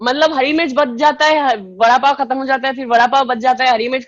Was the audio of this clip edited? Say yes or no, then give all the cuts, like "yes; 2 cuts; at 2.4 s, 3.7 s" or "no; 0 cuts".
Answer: no; 0 cuts